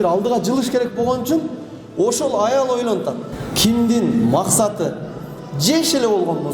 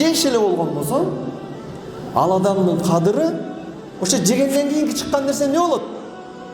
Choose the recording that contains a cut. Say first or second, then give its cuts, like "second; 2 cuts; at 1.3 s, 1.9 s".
first; 1 cut; at 3.3 s